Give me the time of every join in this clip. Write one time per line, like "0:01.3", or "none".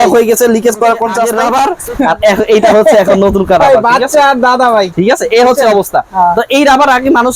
0:01.4